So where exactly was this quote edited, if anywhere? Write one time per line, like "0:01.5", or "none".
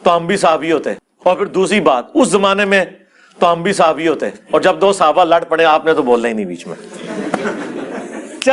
0:01.0
0:04.3